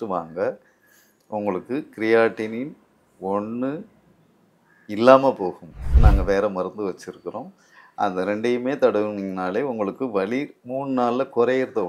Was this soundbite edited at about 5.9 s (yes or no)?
yes